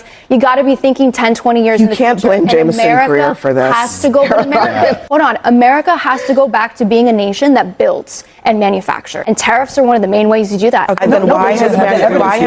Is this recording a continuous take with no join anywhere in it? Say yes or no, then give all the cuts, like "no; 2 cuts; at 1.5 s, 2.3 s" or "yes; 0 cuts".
no; 3 cuts; at 5.0 s, 9.2 s, 11.0 s